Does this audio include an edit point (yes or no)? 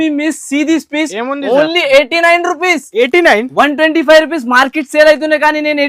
no